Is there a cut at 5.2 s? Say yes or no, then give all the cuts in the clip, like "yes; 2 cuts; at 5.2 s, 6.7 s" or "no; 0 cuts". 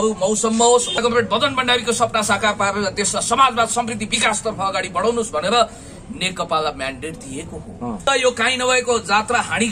no; 2 cuts; at 0.9 s, 8.1 s